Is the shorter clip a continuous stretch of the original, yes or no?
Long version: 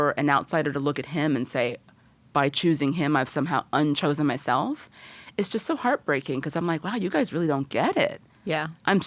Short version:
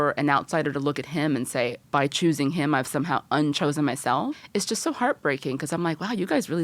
no